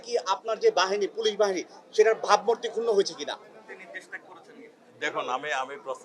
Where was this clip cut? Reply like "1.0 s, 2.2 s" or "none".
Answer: none